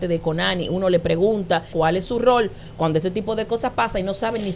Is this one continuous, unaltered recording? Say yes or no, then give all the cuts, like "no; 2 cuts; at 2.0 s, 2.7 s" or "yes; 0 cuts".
no; 1 cut; at 1.7 s